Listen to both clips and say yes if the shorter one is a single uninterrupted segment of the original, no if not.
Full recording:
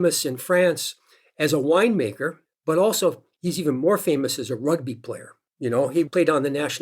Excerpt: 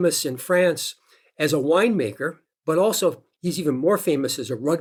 yes